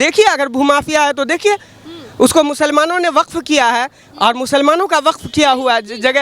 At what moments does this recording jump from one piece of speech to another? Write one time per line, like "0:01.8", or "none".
none

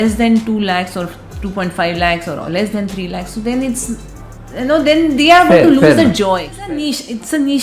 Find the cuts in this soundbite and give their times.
0:06.7

